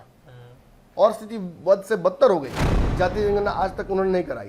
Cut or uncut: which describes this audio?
cut